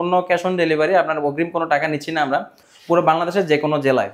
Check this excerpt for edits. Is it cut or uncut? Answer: cut